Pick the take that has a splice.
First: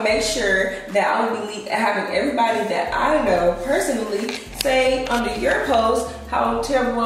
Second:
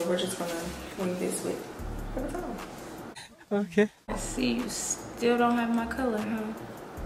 second; 1 cut; at 4.2 s

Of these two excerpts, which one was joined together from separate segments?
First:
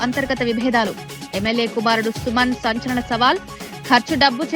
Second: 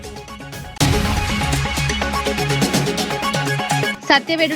second; 3 cuts; at 0.8 s, 2.1 s, 3.5 s

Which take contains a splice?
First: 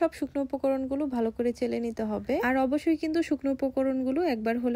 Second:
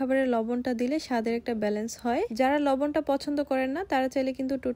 first; 1 cut; at 2.4 s

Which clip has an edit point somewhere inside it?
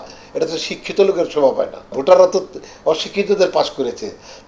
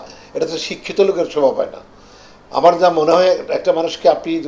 first; 1 cut; at 2.0 s

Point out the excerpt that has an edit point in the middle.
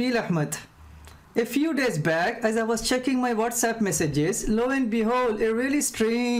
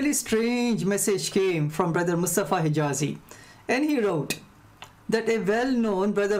second; 2 cuts; at 1.9 s, 3.2 s

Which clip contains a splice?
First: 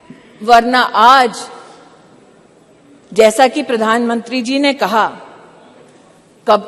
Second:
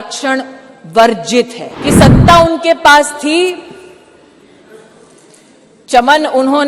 second; 1 cut; at 1.6 s

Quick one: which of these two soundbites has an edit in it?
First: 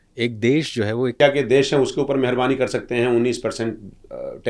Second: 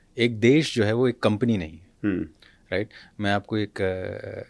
first; 1 cut; at 1.2 s

